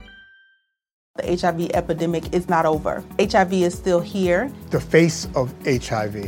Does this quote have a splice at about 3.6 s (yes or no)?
no